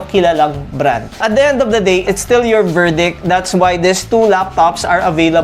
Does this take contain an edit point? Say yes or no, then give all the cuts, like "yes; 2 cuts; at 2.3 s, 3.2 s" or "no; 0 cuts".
yes; 2 cuts; at 1.2 s, 2.0 s